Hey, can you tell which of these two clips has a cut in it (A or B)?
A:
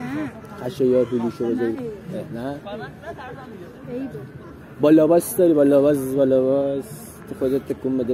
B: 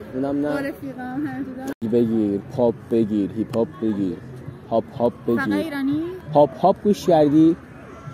B